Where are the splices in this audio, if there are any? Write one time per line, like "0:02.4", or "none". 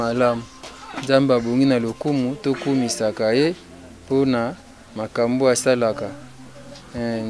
none